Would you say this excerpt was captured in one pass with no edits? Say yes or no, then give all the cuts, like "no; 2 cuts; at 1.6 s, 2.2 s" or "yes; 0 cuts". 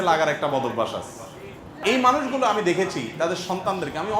no; 1 cut; at 1.7 s